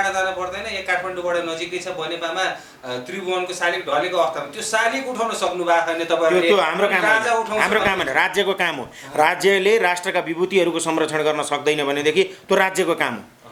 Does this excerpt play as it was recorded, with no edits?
yes; 0 cuts

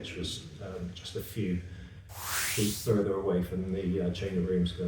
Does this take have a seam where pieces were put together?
no; 0 cuts

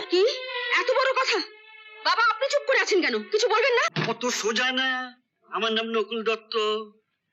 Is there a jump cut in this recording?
yes; 1 cut; at 3.9 s

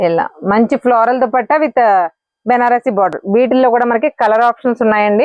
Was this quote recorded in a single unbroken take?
yes; 0 cuts

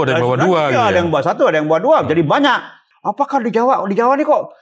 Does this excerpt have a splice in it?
yes; 1 cut; at 2.9 s

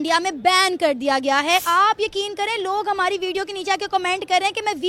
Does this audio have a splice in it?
yes; 1 cut; at 1.6 s

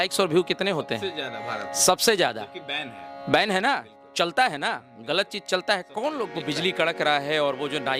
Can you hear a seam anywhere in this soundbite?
yes; 1 cut; at 6.4 s

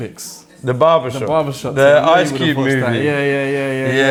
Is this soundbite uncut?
yes; 0 cuts

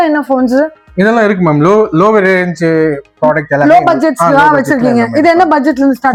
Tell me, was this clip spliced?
no; 0 cuts

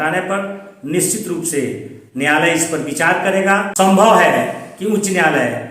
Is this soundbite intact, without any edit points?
no; 1 cut; at 3.7 s

